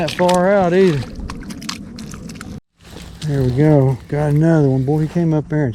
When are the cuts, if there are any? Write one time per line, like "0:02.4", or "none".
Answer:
0:02.6